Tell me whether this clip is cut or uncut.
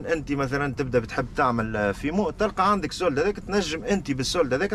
uncut